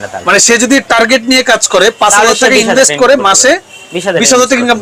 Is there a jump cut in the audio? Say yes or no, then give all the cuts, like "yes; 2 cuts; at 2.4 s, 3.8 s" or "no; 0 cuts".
no; 0 cuts